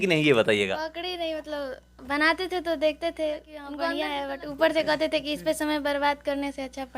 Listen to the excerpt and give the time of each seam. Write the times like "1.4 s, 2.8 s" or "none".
3.7 s